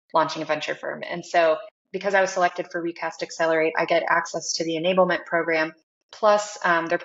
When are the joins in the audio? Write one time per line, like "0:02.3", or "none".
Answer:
0:01.8